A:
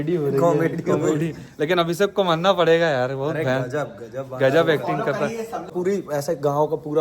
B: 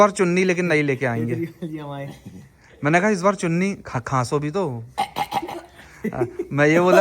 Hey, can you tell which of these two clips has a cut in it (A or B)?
A